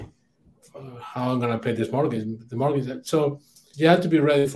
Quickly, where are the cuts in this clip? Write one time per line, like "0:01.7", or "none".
0:03.7